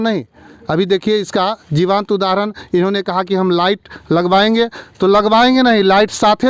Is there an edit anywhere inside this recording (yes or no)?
no